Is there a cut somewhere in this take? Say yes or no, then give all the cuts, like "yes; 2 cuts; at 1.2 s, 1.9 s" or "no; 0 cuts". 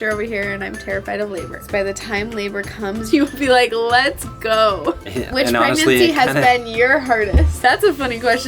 yes; 4 cuts; at 1.7 s, 3.0 s, 5.0 s, 7.5 s